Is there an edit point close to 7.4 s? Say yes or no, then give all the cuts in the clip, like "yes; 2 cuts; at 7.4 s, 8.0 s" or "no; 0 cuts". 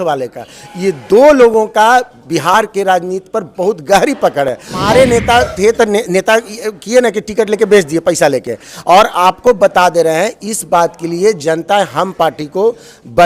no; 1 cut; at 4.8 s